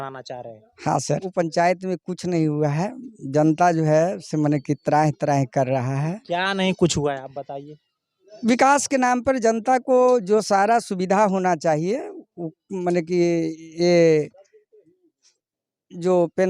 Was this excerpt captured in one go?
no; 1 cut; at 1.3 s

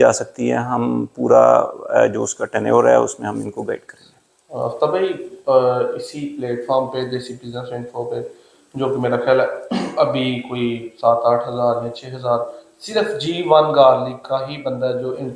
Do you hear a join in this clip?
no; 0 cuts

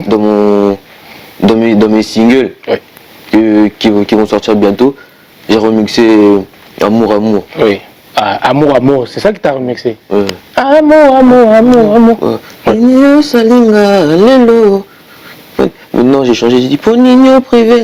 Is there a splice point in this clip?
no; 0 cuts

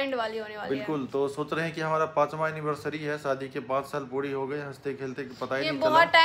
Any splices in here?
no; 0 cuts

